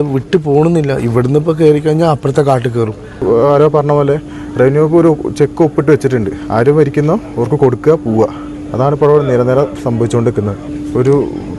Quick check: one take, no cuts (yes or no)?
no